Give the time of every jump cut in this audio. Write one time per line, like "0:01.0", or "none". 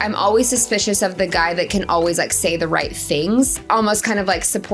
0:03.6